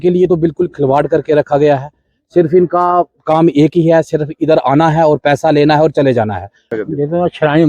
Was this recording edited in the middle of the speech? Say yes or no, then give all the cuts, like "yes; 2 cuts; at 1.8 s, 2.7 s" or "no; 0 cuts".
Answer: yes; 1 cut; at 6.7 s